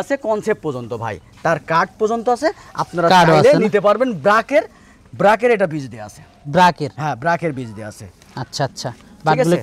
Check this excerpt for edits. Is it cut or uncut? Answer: uncut